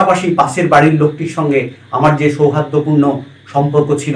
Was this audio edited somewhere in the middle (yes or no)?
no